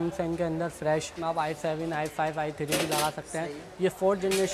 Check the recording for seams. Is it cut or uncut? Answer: cut